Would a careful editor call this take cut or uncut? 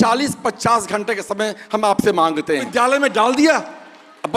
cut